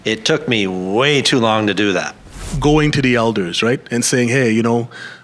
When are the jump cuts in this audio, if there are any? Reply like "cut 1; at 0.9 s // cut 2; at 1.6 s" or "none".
cut 1; at 2.4 s